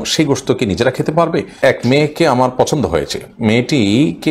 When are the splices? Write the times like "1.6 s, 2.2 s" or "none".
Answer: 1.6 s